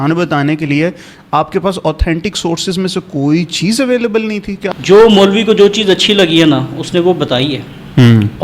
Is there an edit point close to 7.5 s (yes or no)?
no